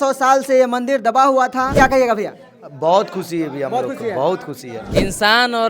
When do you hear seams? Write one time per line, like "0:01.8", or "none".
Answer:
0:01.7
0:04.8